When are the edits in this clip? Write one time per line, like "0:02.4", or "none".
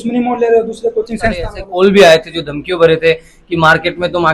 0:01.6